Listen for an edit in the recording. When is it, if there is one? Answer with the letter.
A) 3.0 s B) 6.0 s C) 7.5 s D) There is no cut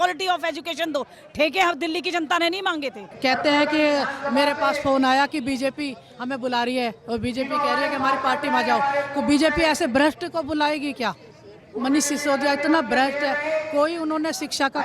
A